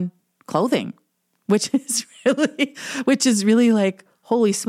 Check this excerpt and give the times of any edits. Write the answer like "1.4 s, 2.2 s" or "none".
none